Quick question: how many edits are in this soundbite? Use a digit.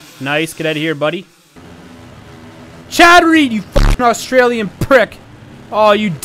1